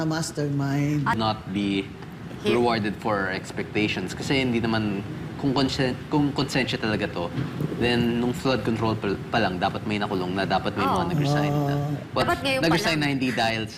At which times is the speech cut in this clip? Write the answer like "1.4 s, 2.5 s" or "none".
1.2 s

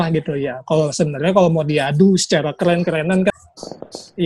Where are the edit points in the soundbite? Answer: 3.3 s

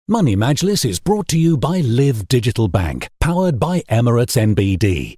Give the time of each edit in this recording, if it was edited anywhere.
none

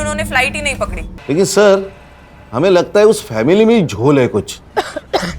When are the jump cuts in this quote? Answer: 1.1 s

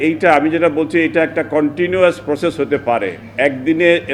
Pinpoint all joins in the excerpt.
none

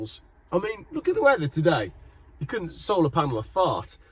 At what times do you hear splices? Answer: none

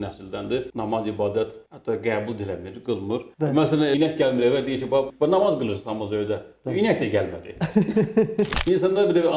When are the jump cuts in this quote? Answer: 3.3 s, 3.9 s, 5.1 s, 8.6 s

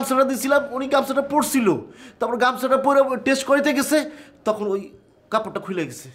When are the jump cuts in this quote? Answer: none

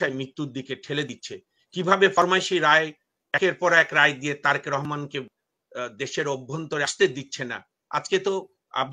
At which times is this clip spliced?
none

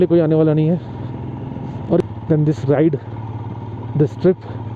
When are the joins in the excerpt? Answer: 2.0 s

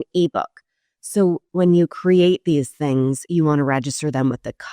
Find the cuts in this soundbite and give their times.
1.5 s

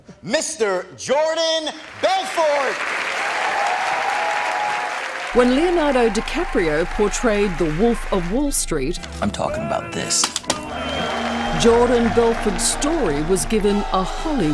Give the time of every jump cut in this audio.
12.6 s

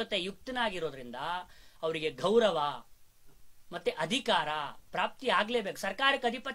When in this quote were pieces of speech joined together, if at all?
none

